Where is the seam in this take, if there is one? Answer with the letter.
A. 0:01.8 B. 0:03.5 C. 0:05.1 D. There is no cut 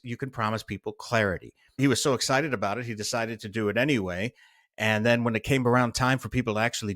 A